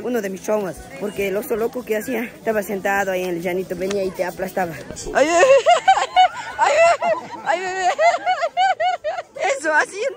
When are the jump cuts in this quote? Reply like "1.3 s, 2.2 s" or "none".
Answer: 4.8 s, 9.2 s